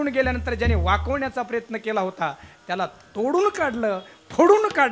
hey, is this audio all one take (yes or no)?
yes